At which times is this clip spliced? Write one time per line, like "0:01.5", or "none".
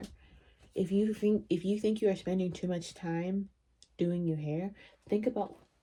none